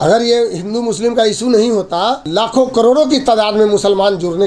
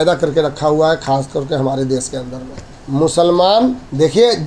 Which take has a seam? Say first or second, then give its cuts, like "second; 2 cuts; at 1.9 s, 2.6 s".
first; 1 cut; at 2.3 s